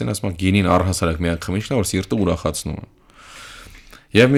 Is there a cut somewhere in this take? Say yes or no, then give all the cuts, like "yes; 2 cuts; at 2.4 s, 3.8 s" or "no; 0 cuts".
no; 0 cuts